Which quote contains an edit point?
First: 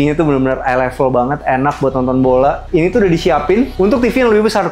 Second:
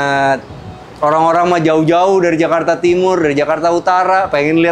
first; 2 cuts; at 2.6 s, 3.7 s

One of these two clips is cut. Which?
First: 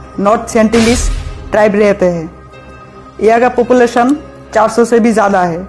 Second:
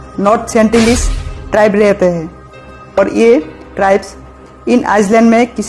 second; 1 cut; at 3.0 s

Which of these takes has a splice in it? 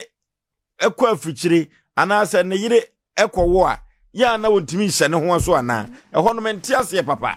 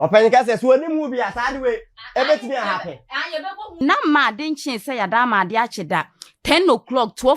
second; 1 cut; at 3.8 s

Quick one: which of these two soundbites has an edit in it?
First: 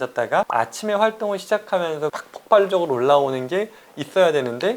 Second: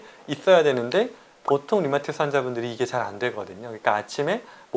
first; 1 cut; at 2.2 s

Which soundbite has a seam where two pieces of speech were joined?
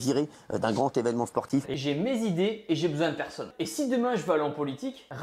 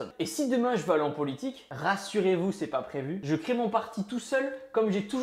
first; 1 cut; at 1.7 s

